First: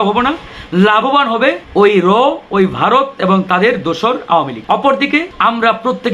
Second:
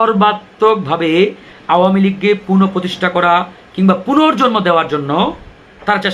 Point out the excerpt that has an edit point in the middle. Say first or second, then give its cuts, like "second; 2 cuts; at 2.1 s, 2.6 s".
first; 3 cuts; at 1.6 s, 4.6 s, 5.3 s